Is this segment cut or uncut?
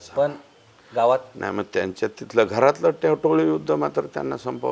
uncut